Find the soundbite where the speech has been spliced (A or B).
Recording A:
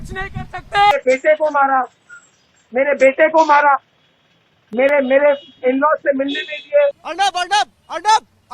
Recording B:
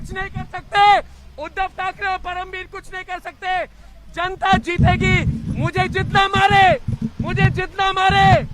A